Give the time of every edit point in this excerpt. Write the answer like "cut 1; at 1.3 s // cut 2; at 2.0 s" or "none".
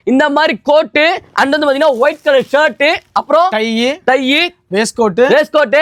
none